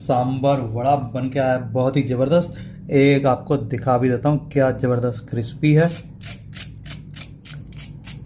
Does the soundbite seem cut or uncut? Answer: uncut